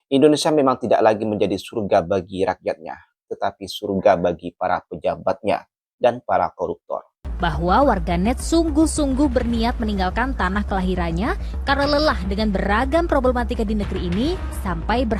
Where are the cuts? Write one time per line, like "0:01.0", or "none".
0:07.2